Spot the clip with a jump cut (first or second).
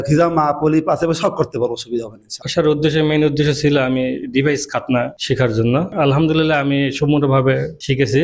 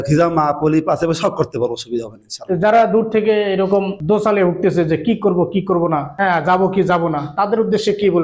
first